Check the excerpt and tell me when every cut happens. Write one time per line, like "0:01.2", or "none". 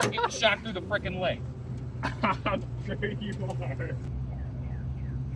0:04.1